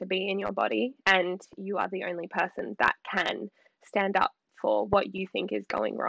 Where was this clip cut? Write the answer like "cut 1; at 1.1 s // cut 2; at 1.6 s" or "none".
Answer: none